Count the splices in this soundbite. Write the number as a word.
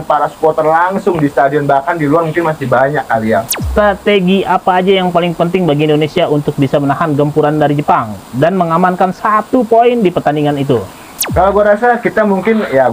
one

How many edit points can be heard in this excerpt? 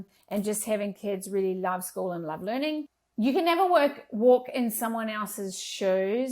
one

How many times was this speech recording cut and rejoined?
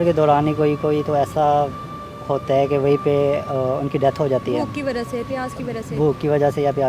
zero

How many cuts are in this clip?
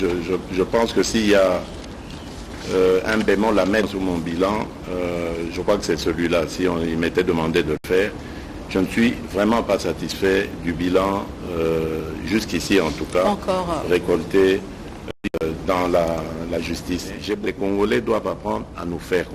one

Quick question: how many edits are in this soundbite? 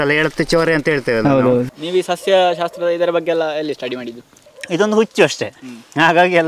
one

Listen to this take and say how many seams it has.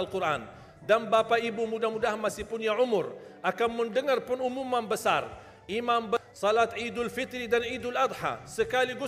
one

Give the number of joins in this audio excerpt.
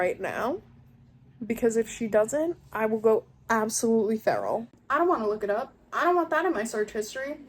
one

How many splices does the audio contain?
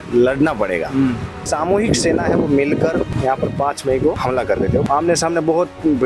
three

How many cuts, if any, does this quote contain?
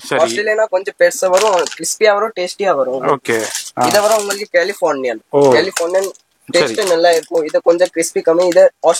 zero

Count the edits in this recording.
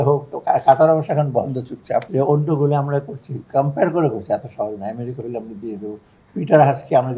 one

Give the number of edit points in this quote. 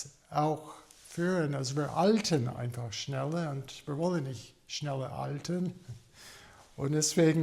zero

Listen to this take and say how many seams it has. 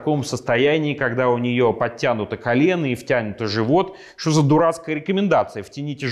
zero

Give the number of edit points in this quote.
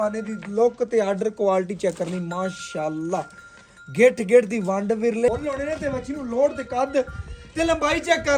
one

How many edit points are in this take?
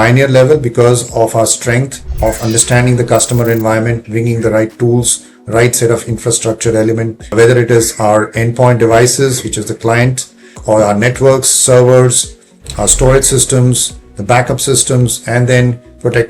four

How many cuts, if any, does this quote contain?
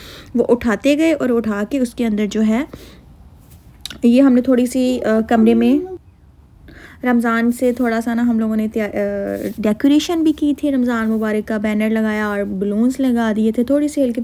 zero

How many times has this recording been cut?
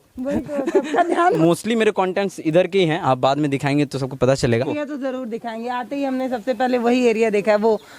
two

